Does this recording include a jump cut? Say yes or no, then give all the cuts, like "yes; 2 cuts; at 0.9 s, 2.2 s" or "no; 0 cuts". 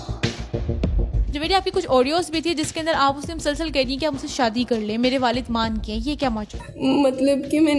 no; 0 cuts